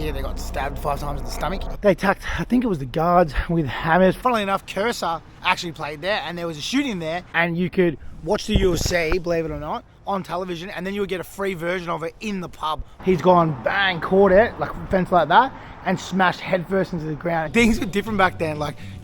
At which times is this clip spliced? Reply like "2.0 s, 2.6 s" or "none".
1.7 s, 4.2 s, 7.3 s, 12.9 s, 17.5 s